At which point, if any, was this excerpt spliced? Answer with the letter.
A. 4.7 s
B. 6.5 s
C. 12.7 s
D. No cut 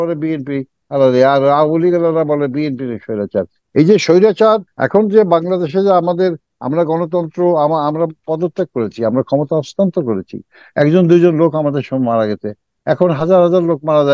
A